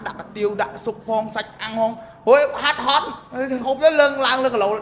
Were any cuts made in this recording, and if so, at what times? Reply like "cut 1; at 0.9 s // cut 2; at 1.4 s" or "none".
none